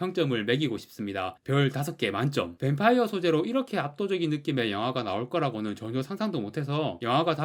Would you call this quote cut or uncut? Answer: cut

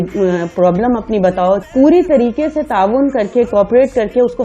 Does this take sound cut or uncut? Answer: cut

